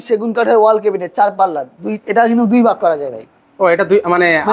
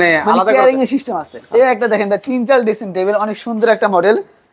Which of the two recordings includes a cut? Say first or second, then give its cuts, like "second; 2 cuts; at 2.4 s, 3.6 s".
second; 1 cut; at 1.3 s